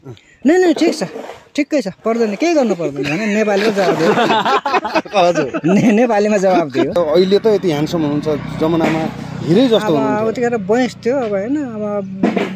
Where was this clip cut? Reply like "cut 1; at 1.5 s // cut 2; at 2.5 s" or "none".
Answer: cut 1; at 7.0 s